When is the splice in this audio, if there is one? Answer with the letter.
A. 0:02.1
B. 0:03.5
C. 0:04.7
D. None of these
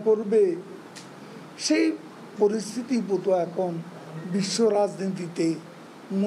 D